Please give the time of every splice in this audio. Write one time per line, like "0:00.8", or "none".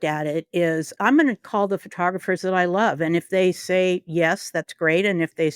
none